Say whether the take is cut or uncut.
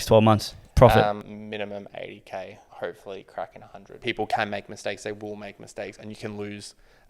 cut